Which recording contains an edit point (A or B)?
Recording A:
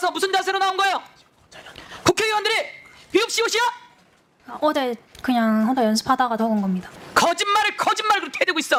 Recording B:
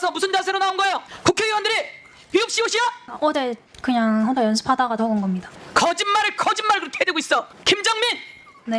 B